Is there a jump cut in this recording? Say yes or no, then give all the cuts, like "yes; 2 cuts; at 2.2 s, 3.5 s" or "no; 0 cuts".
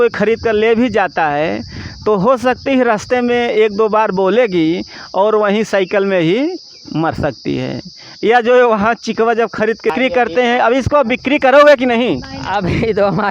yes; 1 cut; at 9.9 s